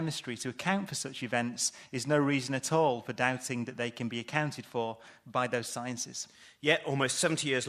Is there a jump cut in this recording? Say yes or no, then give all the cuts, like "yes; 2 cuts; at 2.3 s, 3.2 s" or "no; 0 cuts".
yes; 1 cut; at 1.5 s